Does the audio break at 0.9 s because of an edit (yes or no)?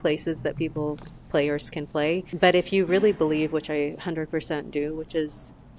no